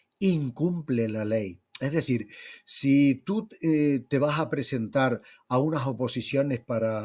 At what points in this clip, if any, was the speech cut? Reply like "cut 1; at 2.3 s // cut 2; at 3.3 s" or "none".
none

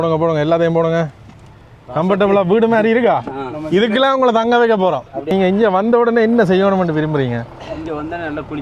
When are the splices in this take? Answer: cut 1; at 5.1 s

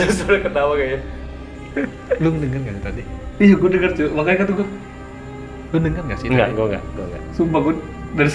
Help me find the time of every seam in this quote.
cut 1; at 1.6 s

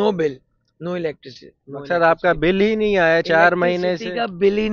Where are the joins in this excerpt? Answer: none

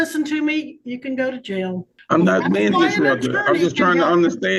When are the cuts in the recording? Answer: cut 1; at 1.9 s

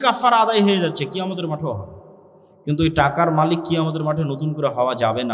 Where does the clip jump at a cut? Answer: none

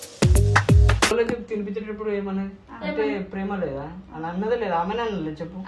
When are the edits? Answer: cut 1; at 1.1 s

